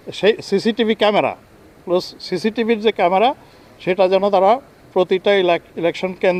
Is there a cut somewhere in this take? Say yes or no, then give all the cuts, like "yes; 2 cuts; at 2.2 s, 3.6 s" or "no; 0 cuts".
no; 0 cuts